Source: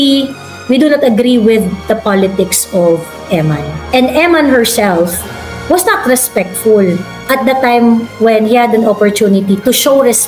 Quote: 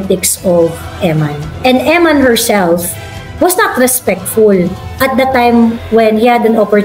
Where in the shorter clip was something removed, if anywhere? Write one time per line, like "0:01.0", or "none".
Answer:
none